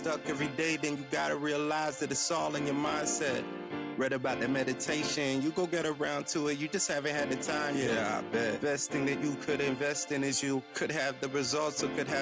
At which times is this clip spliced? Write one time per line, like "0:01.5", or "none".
none